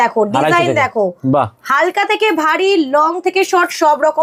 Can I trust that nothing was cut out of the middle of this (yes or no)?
yes